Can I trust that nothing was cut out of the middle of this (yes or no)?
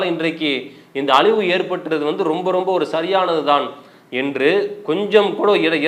yes